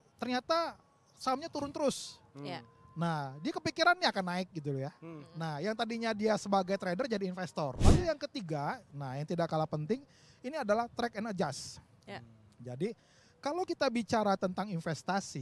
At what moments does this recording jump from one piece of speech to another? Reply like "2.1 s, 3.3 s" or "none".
7.8 s